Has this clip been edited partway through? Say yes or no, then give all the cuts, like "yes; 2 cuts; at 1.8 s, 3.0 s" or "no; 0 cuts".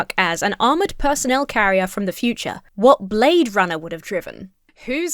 no; 0 cuts